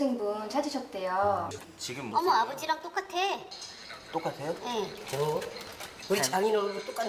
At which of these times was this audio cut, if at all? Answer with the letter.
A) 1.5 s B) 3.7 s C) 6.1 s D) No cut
A